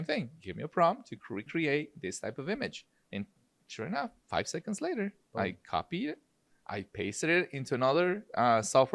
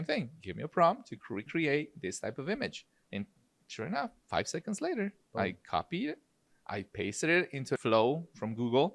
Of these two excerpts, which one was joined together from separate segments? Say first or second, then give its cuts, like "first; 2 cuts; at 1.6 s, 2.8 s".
second; 1 cut; at 7.6 s